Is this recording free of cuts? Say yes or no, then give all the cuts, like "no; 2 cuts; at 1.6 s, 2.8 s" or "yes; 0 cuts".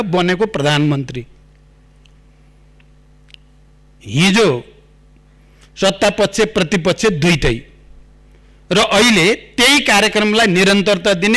yes; 0 cuts